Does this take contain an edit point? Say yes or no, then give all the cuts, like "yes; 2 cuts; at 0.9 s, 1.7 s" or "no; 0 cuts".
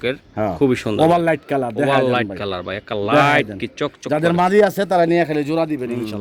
no; 0 cuts